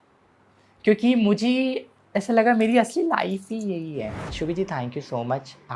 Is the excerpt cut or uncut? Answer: cut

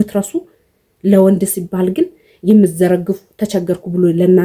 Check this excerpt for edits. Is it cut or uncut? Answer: uncut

